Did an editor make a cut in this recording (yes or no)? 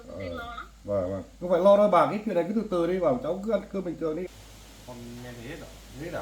yes